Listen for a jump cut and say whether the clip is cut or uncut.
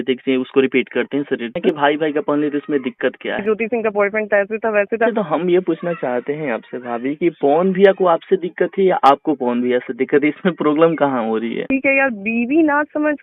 cut